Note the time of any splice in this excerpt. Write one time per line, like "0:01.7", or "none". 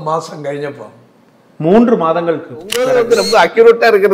0:02.8